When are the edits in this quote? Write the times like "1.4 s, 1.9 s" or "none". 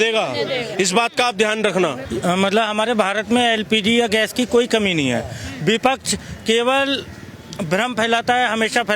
2.0 s